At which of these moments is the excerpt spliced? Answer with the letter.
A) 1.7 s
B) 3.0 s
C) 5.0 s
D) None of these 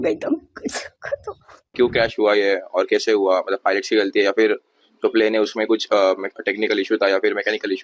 A